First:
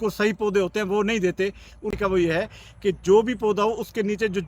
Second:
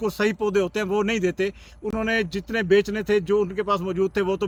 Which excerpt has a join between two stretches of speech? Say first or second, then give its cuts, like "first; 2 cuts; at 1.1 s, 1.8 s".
first; 1 cut; at 1.9 s